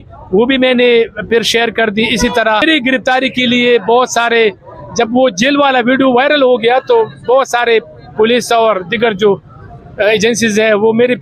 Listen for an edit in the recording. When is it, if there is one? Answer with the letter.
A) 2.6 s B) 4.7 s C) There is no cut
A